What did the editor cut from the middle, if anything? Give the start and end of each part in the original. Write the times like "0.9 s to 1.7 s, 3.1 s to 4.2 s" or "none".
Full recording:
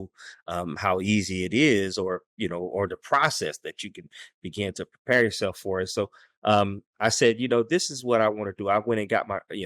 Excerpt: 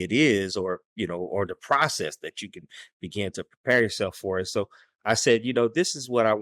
6.3 s to 6.8 s